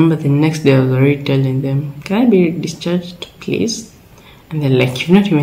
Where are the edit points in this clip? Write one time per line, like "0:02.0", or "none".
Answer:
none